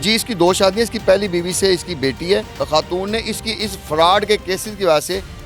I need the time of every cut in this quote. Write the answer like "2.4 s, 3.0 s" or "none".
2.6 s